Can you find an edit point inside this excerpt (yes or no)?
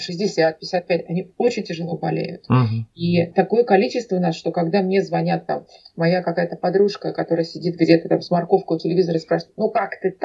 no